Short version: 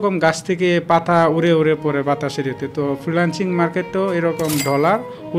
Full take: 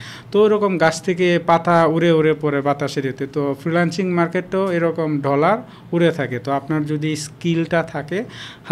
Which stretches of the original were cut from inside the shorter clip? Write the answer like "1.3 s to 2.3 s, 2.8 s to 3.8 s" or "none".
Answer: none

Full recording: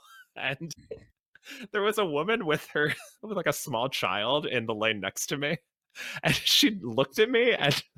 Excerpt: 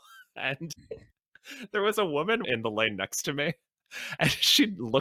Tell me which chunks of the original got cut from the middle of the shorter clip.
2.4 s to 4.5 s

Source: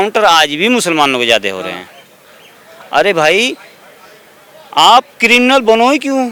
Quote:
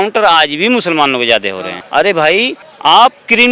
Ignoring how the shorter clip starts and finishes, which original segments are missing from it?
1.7 s to 2.7 s, 3.6 s to 4.6 s

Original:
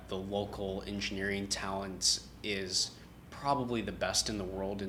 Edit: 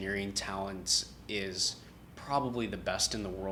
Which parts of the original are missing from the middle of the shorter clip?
none

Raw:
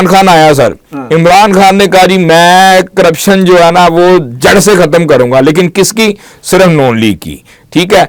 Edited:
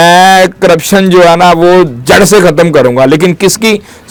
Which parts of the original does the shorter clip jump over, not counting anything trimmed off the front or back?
none

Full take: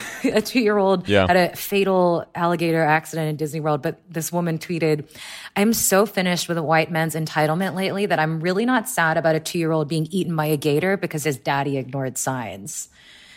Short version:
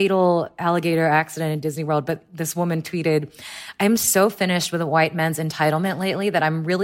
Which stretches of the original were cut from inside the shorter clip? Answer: none

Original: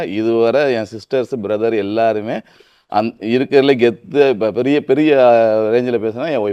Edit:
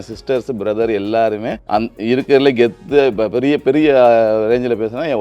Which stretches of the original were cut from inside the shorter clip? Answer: 2.4 s to 2.8 s

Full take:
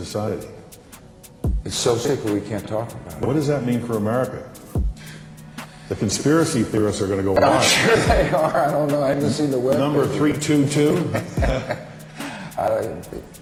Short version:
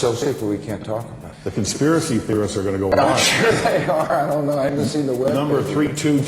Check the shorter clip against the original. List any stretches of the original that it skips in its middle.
3.0 s to 5.6 s

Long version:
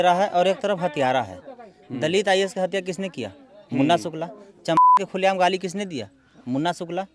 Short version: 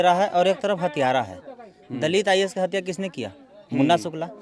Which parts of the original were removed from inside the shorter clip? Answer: none

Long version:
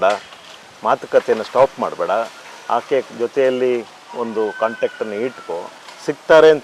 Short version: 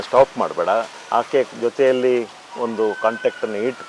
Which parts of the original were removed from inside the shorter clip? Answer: 2.4 s to 2.5 s

